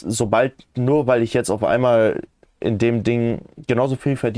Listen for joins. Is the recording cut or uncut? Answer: uncut